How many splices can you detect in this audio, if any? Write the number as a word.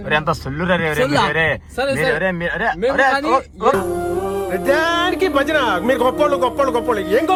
zero